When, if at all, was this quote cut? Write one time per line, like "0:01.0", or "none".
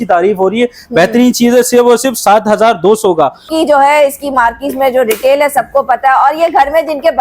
0:03.5